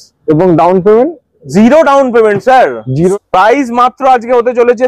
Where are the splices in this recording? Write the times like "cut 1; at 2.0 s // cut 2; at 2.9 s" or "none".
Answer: cut 1; at 3.1 s